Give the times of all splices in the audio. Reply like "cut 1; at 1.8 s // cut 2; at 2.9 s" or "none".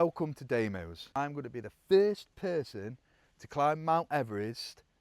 cut 1; at 1.0 s

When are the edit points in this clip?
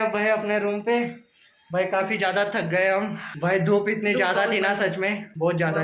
none

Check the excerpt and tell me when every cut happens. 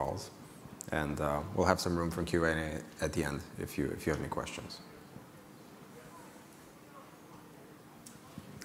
cut 1; at 1.9 s

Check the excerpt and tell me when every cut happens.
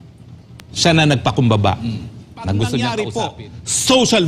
cut 1; at 3.0 s

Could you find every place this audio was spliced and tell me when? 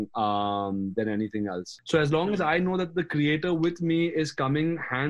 cut 1; at 1.7 s

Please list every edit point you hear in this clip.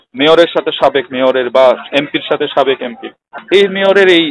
cut 1; at 3.3 s

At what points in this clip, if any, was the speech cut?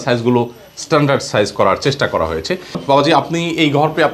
cut 1; at 2.8 s

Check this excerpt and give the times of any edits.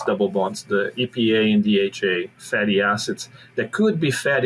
cut 1; at 2.4 s

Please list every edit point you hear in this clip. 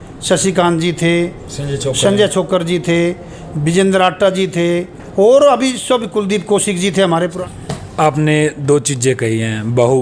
cut 1; at 7.4 s

